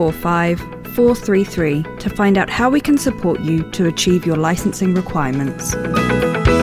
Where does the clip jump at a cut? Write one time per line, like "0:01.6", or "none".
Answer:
0:05.7